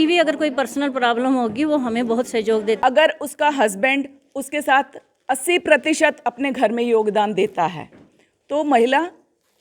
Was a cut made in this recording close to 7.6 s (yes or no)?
no